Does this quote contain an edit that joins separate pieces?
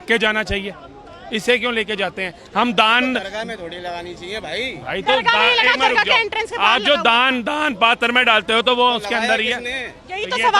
no; 0 cuts

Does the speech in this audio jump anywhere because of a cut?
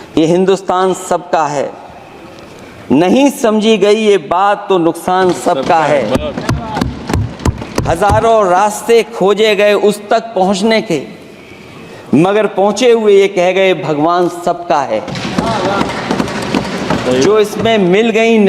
no; 0 cuts

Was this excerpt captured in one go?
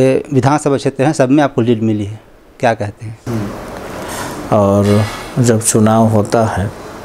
no; 1 cut; at 3.1 s

